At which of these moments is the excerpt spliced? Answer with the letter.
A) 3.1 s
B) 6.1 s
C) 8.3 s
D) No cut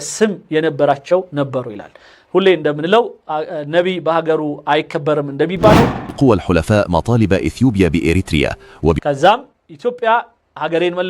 B